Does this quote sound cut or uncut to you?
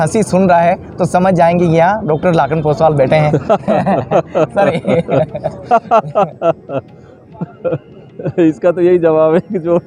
uncut